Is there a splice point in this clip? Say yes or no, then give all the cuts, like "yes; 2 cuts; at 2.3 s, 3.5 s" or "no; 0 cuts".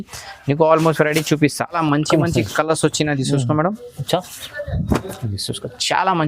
yes; 1 cut; at 1.7 s